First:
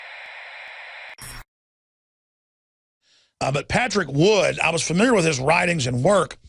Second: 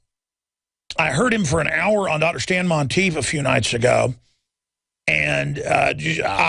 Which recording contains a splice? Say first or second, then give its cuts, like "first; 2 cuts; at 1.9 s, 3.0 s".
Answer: first; 1 cut; at 1.1 s